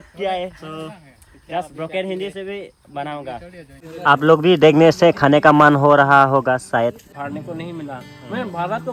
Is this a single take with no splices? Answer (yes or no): no